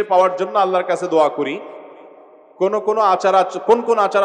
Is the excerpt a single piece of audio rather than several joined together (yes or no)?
yes